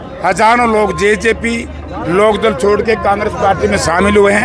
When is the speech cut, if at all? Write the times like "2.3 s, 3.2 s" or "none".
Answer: none

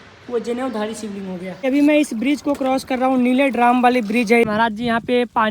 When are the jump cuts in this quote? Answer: 1.6 s, 4.4 s

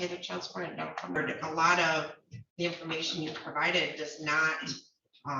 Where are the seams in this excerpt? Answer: 1.2 s

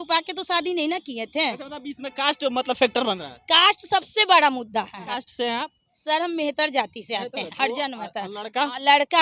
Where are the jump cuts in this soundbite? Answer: 5.1 s, 7.5 s

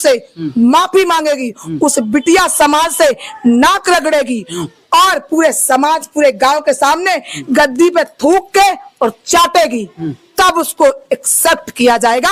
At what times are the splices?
none

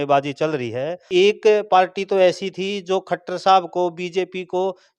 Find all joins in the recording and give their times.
1.0 s

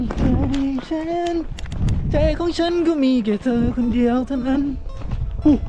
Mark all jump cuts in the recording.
none

